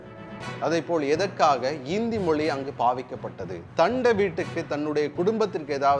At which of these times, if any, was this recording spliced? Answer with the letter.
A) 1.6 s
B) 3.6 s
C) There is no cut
B